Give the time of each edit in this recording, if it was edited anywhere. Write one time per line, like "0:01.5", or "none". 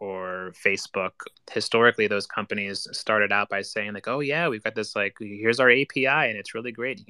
0:01.3